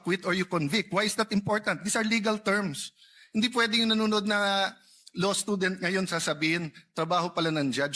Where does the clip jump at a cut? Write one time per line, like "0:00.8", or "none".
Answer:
none